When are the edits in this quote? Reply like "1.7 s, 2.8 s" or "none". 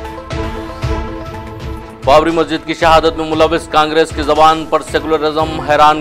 1.4 s